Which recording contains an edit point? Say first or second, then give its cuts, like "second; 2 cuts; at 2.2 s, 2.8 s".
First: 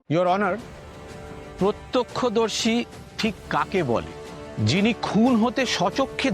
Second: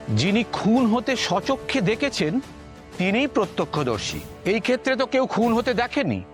first; 1 cut; at 1.1 s